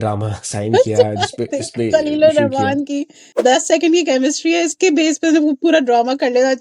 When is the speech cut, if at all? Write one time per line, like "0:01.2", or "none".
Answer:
0:03.3